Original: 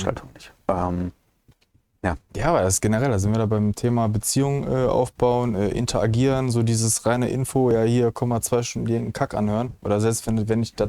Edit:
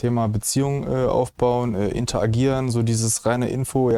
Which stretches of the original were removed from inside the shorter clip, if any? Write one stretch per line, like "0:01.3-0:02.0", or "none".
none